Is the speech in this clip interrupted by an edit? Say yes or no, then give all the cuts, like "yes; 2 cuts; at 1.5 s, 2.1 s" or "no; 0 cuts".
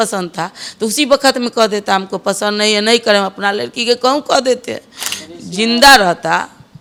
no; 0 cuts